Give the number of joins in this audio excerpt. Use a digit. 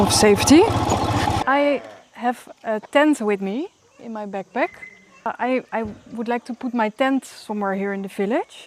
2